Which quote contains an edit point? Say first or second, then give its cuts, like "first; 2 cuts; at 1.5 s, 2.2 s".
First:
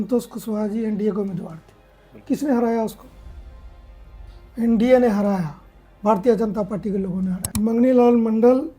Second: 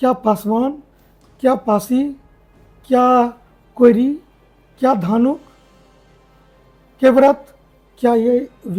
first; 1 cut; at 7.4 s